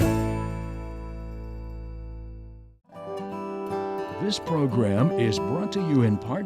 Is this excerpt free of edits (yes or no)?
no